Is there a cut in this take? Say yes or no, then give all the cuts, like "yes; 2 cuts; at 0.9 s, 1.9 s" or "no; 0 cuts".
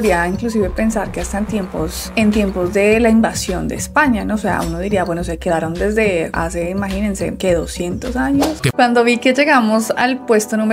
yes; 1 cut; at 8.6 s